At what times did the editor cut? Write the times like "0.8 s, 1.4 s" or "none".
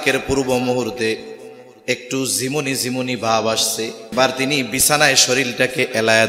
4.1 s